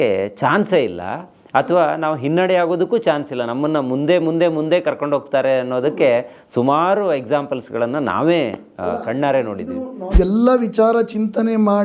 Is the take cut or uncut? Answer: cut